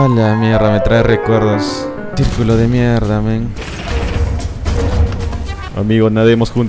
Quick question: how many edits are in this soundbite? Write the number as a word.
zero